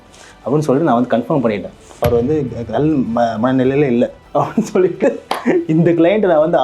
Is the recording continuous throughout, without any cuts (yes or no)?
no